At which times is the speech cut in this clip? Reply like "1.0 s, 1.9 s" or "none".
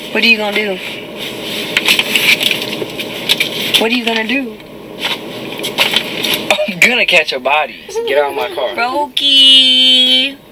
7.9 s